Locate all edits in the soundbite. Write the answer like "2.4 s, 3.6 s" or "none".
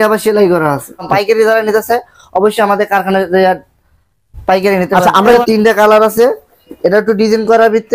1.1 s, 5.4 s